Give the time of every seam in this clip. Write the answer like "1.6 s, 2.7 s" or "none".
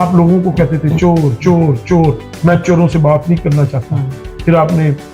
none